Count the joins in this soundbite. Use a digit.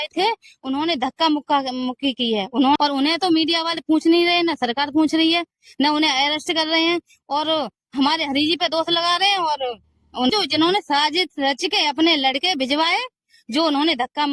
2